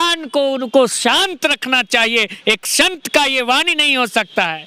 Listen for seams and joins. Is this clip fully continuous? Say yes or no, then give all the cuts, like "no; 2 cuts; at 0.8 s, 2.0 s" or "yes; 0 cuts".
yes; 0 cuts